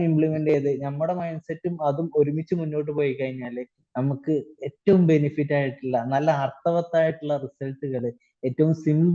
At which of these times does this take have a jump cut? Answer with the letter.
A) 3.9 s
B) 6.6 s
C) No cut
C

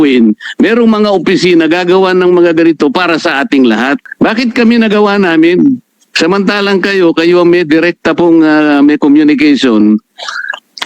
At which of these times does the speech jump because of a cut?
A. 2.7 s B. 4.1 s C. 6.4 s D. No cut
B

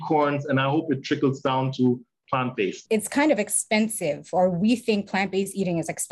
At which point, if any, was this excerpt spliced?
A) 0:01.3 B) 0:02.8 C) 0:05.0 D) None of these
B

